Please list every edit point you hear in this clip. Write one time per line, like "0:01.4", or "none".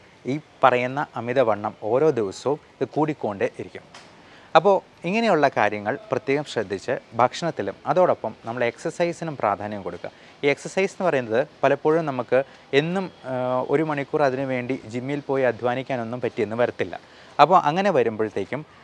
none